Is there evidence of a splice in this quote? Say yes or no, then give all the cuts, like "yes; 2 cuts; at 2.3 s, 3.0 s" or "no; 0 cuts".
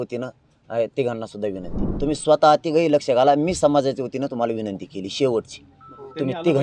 yes; 1 cut; at 1.8 s